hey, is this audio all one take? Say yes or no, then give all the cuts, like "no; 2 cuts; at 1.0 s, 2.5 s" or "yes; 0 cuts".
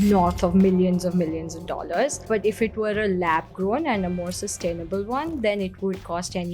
no; 1 cut; at 2.2 s